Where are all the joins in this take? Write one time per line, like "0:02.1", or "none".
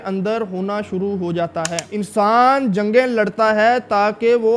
0:01.9

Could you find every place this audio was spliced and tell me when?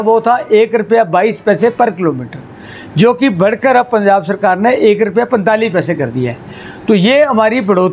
none

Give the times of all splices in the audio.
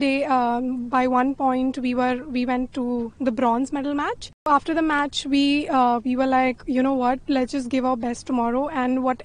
0:04.5

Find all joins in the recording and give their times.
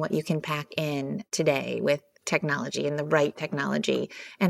0:01.3

